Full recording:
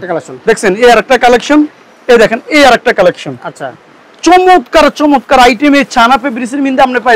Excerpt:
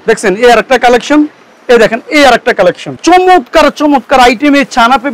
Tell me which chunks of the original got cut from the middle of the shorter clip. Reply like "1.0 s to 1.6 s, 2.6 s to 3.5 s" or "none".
3.3 s to 4.1 s